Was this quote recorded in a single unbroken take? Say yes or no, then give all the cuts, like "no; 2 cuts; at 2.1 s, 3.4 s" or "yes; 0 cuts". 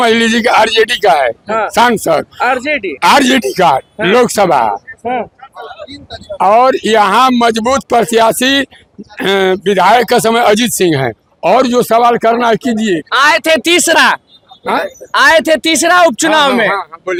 yes; 0 cuts